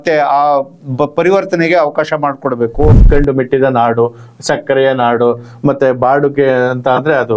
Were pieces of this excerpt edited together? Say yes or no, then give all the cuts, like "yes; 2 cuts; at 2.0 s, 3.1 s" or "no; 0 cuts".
yes; 1 cut; at 2.9 s